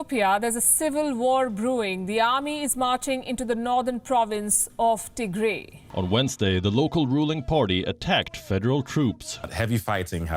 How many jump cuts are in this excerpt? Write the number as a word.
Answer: zero